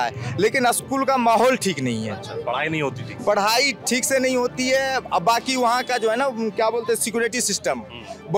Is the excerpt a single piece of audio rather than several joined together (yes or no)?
yes